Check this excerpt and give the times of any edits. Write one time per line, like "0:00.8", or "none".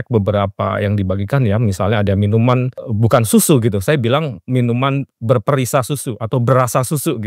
0:02.8